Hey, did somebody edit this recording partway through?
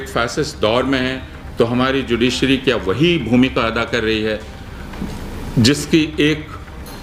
no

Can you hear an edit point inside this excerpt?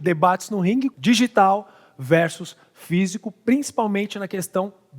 yes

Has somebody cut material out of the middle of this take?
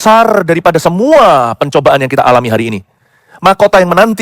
no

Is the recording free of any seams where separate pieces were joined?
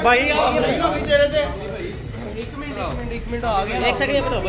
yes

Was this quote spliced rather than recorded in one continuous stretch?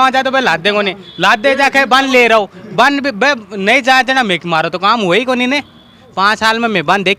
yes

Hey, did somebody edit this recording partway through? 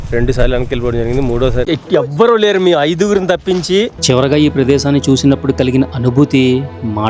yes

